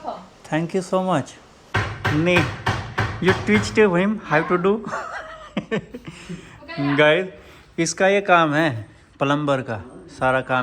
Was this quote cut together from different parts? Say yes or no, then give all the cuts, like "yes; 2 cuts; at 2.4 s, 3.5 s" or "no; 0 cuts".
yes; 1 cut; at 1.6 s